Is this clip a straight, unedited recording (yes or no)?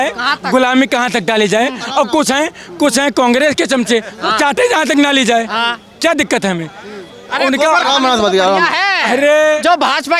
yes